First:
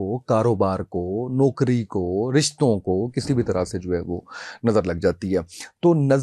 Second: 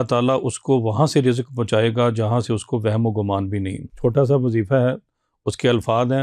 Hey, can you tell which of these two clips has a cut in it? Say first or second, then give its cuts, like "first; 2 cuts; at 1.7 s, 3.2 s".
second; 1 cut; at 3.8 s